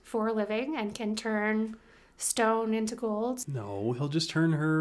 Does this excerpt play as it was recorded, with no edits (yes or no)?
no